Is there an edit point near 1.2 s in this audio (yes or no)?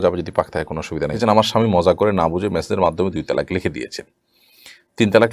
yes